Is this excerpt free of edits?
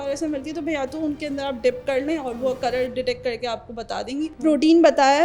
no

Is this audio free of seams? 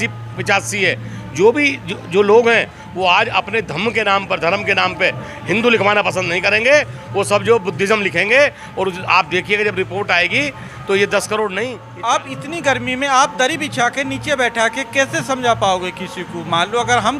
no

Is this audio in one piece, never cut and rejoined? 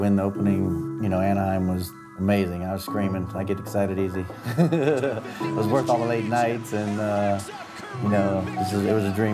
no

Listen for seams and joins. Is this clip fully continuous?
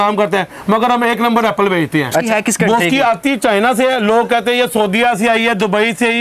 no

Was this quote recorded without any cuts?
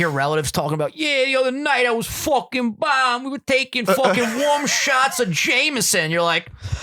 yes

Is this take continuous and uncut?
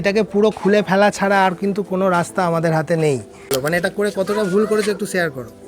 no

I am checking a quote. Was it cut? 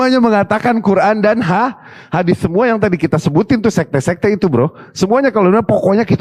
no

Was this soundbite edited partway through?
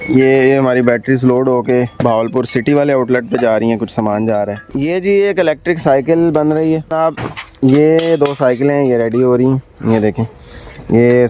yes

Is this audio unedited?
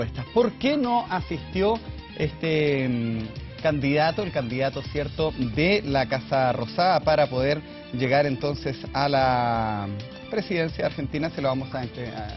yes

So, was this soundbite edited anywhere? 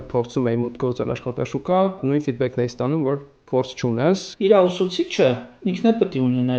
yes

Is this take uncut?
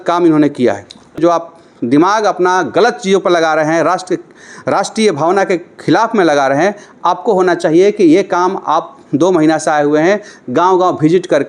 no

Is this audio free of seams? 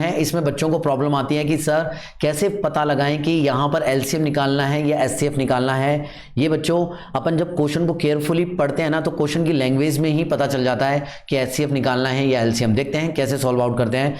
yes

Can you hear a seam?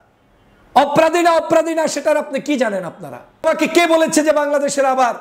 yes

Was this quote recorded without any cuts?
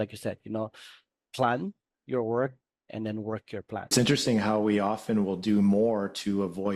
no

